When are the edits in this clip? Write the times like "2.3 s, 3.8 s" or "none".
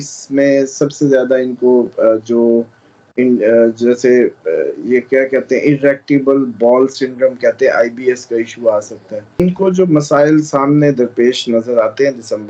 9.4 s